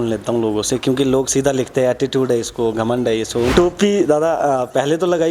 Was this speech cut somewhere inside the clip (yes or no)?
yes